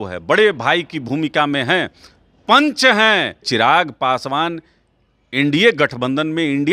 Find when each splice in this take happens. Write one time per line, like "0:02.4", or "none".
0:03.5

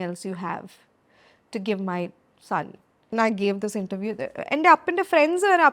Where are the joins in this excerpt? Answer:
0:03.1

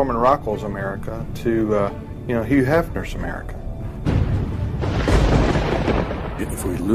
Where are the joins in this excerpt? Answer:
0:05.7

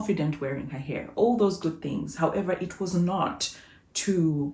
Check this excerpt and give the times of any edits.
none

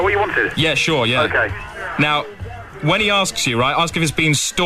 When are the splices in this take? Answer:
none

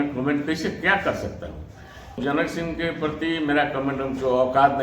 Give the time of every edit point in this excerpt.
0:02.2

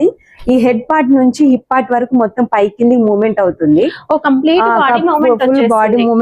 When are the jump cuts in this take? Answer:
none

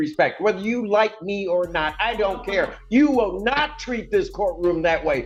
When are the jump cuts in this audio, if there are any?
none

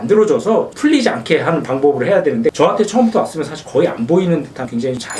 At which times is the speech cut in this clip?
0:02.5

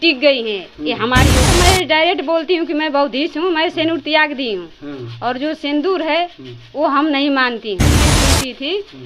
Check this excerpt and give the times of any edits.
0:01.4
0:08.1

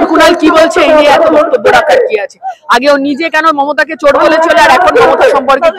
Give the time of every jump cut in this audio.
none

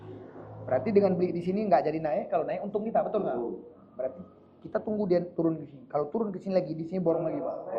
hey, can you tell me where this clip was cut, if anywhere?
none

